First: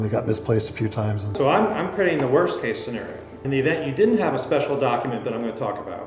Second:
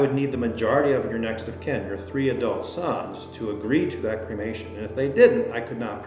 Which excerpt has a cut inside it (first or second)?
first